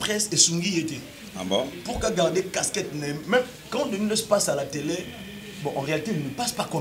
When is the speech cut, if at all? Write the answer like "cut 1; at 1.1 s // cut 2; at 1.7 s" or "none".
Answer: none